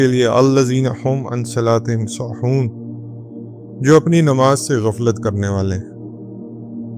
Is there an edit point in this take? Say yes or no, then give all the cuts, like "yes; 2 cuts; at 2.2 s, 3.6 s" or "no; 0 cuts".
yes; 1 cut; at 5.8 s